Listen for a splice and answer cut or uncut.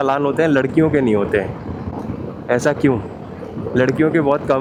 uncut